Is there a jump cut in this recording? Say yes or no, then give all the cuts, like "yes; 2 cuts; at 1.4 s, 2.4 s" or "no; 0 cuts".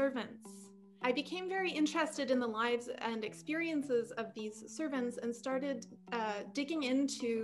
yes; 1 cut; at 1.0 s